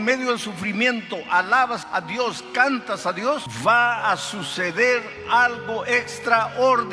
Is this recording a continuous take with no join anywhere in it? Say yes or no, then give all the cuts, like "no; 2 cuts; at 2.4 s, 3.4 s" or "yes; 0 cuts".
no; 2 cuts; at 1.8 s, 3.5 s